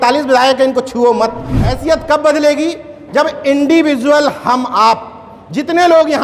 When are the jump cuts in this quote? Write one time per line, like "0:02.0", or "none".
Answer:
0:01.7